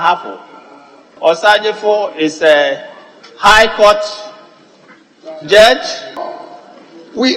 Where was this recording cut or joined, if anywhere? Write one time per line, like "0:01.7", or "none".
0:06.2